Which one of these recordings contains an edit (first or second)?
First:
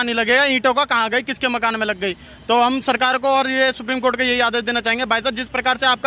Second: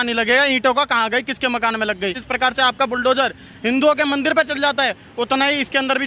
second